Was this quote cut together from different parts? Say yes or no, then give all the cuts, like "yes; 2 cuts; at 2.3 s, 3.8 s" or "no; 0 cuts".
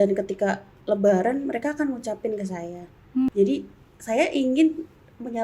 yes; 1 cut; at 3.3 s